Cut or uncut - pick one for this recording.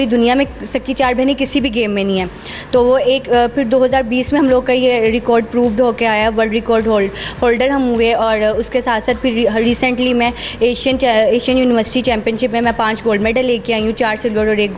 uncut